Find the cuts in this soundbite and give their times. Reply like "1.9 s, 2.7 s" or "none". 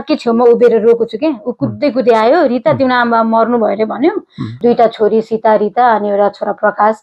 4.6 s